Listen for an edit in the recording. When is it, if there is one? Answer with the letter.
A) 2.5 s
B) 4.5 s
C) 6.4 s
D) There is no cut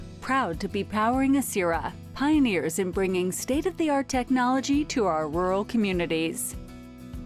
C